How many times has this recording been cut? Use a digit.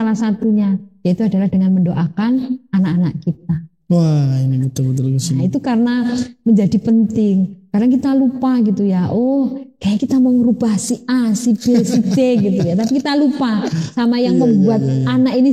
0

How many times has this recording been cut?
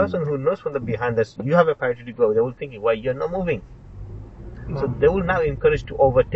0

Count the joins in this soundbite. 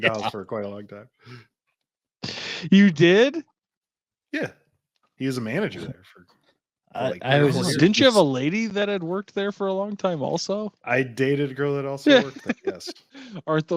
0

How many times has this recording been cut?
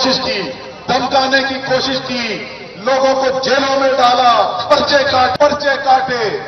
1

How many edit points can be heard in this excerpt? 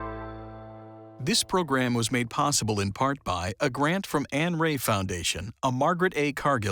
1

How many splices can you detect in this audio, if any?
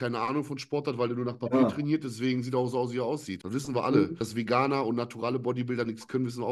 2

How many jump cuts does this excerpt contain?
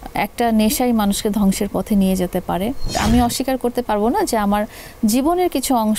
1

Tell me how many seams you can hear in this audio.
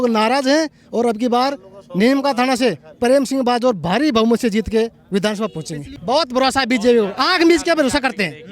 1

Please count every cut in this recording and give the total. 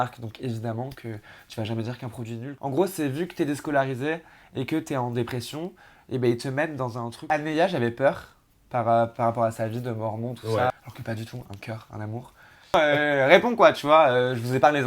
4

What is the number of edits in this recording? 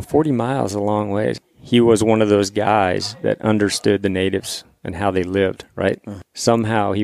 2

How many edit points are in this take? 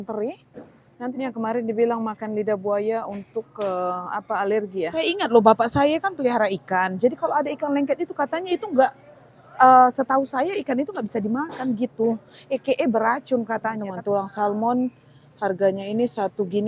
3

